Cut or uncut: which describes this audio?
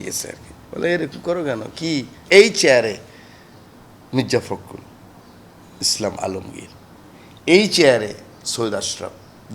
cut